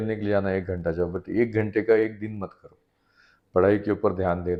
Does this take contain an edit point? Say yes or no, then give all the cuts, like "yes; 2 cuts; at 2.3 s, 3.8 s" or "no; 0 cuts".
no; 0 cuts